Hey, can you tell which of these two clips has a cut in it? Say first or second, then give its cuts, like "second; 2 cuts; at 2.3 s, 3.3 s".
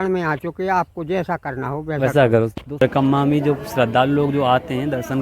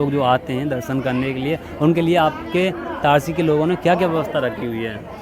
first; 1 cut; at 2.8 s